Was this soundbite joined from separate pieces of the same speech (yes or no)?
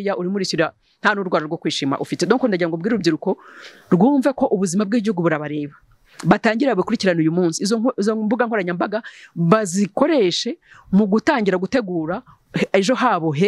no